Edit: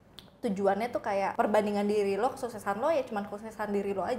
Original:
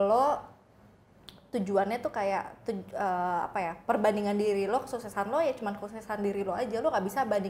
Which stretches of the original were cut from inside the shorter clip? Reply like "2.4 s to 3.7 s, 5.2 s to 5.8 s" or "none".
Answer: 2.4 s to 3.8 s